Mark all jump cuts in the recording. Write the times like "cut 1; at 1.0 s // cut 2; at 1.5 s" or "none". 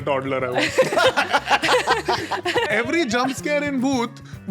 cut 1; at 2.7 s